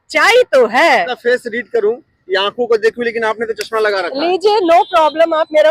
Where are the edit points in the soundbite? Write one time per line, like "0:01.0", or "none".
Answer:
0:01.1